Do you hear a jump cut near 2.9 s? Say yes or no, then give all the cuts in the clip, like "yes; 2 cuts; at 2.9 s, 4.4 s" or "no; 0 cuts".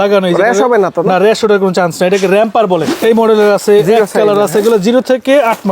yes; 1 cut; at 2.9 s